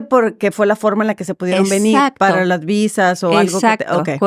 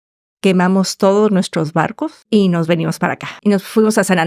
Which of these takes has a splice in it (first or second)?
second